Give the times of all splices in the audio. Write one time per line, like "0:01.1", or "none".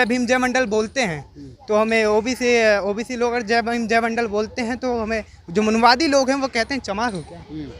none